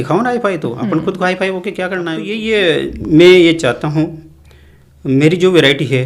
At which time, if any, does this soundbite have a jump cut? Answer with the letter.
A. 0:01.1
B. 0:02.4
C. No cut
B